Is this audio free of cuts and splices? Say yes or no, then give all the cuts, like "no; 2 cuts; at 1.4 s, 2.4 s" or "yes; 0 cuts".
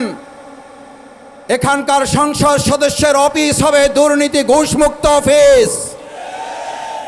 yes; 0 cuts